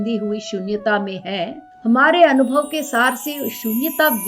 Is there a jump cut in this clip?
yes; 1 cut; at 1.6 s

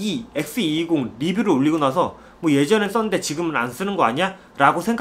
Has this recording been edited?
no; 0 cuts

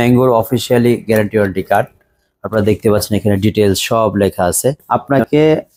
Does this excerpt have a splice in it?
yes; 1 cut; at 4.8 s

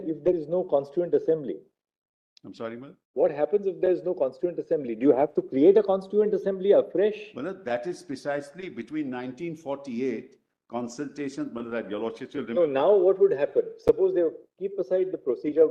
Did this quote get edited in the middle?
no; 0 cuts

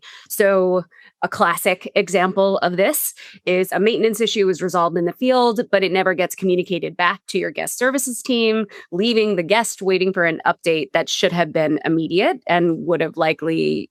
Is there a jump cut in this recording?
no; 0 cuts

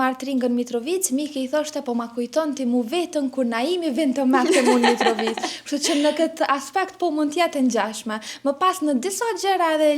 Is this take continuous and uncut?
yes; 0 cuts

